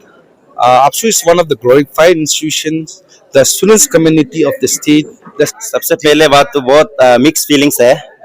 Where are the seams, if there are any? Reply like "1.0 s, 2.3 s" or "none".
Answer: 5.5 s